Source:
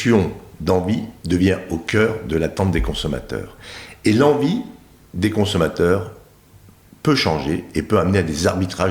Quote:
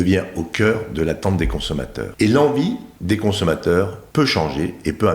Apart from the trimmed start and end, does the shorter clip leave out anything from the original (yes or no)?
yes